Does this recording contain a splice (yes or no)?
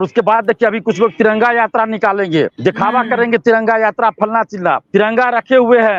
yes